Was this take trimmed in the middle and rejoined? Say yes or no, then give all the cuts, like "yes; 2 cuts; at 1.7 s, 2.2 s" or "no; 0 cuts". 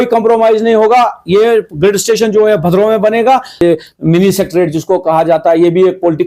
yes; 1 cut; at 3.6 s